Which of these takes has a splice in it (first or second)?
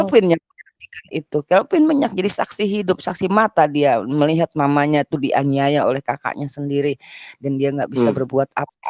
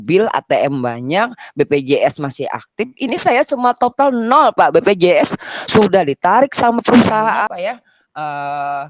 second